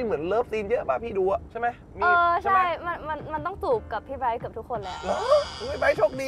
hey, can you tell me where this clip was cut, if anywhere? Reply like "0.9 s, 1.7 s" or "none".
none

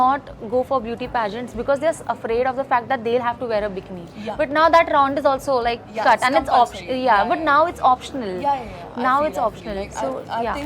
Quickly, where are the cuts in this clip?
none

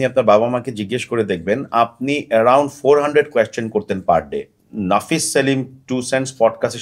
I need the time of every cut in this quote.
4.6 s

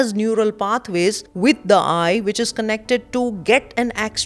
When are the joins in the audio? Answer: 1.3 s

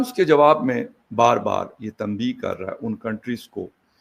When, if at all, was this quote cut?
none

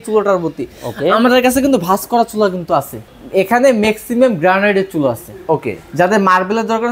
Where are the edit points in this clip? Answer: 3.1 s

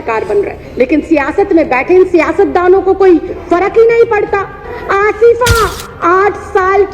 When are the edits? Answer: 4.7 s

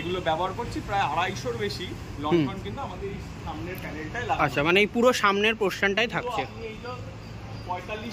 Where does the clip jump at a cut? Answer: none

